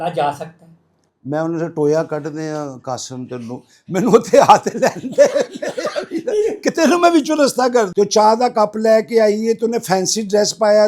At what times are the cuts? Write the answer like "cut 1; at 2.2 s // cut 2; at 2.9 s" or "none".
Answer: cut 1; at 7.9 s